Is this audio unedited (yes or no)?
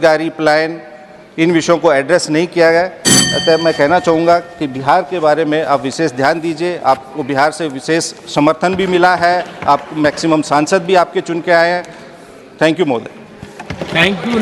yes